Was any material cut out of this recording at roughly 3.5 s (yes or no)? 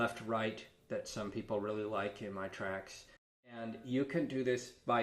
yes